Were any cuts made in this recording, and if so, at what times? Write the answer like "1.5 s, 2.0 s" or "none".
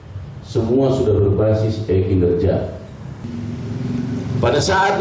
3.2 s